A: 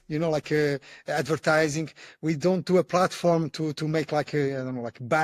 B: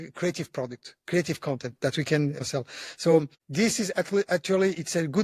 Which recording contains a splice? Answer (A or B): B